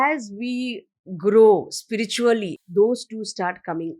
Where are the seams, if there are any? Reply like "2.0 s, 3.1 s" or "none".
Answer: 2.5 s